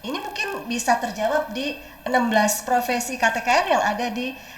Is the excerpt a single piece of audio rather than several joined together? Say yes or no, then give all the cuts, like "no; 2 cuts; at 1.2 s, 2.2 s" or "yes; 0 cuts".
yes; 0 cuts